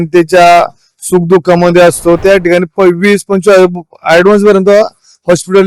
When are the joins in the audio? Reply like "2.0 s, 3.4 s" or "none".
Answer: 2.2 s